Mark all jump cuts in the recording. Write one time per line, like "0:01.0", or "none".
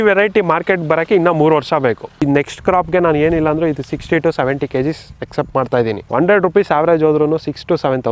0:02.2
0:05.1
0:06.0